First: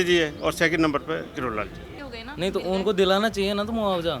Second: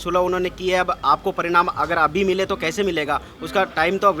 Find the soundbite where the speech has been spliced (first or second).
first